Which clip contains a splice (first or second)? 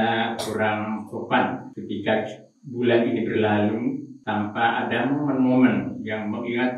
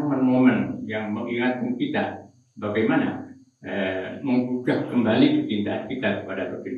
first